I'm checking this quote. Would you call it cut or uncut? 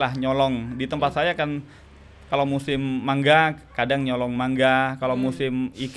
uncut